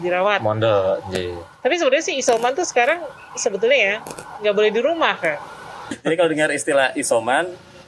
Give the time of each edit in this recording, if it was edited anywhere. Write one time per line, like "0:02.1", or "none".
0:05.9

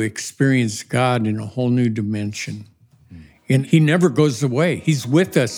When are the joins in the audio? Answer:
0:03.6

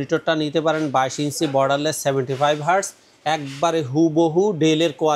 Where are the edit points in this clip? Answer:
none

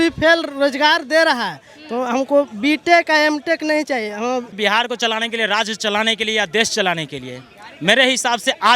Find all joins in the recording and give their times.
0:04.5

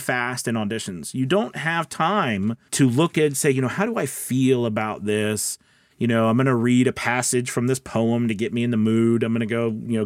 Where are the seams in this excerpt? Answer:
0:02.6

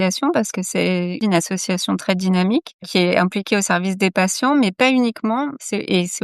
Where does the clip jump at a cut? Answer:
0:01.2

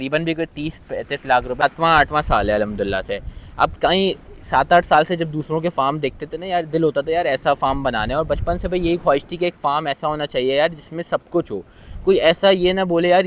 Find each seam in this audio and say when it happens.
0:01.6

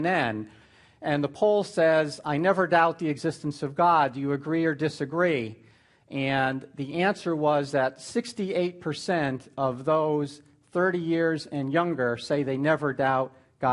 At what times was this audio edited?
0:12.8

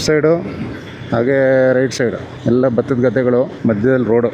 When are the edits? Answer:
0:02.3
0:03.5

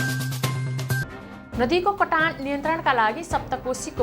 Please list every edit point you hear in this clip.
0:01.2

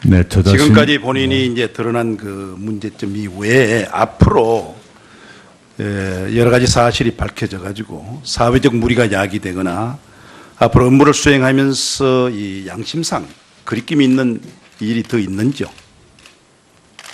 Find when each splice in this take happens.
0:06.7

